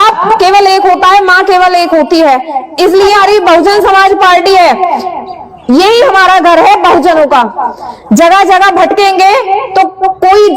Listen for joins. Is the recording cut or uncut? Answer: cut